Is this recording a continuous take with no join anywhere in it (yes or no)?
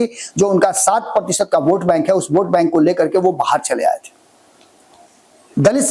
yes